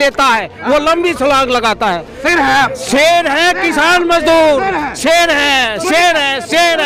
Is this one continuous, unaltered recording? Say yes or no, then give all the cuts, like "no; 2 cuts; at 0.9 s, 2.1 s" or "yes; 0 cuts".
yes; 0 cuts